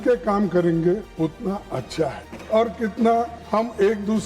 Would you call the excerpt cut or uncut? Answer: cut